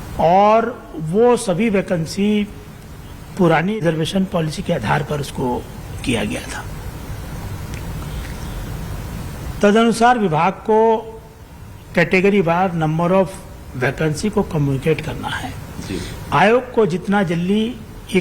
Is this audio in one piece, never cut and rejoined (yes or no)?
no